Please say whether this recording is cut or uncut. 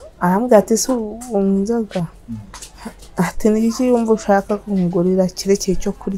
uncut